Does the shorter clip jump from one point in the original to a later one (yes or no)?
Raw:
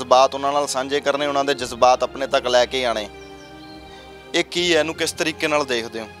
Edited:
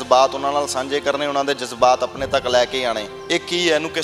yes